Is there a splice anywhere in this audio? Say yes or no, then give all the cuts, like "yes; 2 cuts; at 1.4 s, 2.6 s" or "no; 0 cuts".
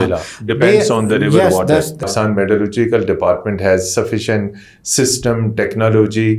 yes; 1 cut; at 2.0 s